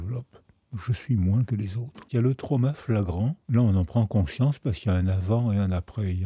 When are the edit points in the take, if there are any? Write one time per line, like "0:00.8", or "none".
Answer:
0:02.0
0:03.4